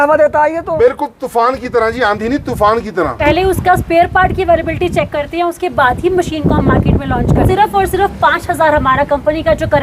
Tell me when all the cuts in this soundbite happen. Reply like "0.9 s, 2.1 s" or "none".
3.2 s, 7.5 s